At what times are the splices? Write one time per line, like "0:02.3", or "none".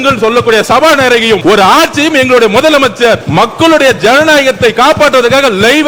0:01.4
0:03.2

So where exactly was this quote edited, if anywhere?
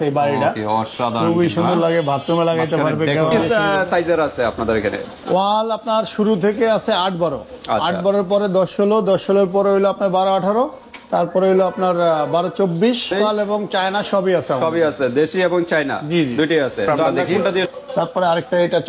0:03.4
0:13.1
0:17.7

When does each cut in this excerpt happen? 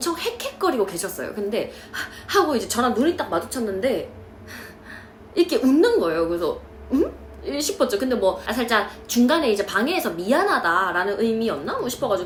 none

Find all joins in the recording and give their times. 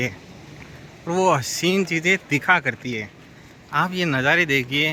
none

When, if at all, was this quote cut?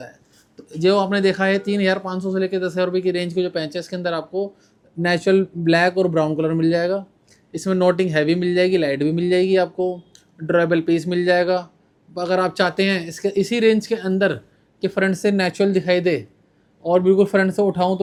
none

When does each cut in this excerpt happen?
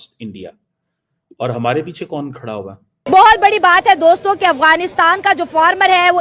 0:02.9

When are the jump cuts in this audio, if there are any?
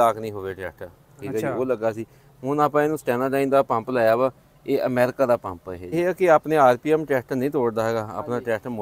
0:05.9

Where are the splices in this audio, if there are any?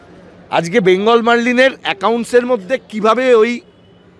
none

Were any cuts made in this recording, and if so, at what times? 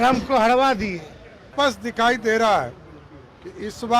0:01.5

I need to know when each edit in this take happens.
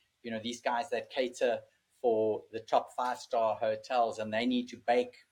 none

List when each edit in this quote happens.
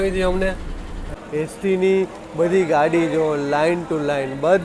0:01.1

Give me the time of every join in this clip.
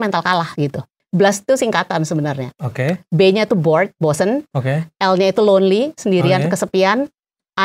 0:00.9

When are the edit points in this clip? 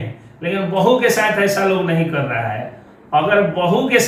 none

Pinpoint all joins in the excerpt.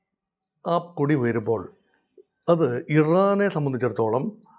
none

